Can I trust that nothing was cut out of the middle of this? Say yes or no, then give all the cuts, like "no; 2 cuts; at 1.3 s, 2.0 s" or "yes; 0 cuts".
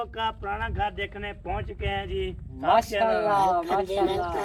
yes; 0 cuts